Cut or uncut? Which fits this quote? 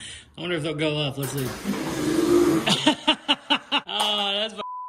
cut